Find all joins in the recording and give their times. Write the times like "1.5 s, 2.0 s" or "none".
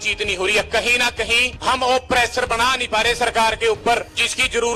none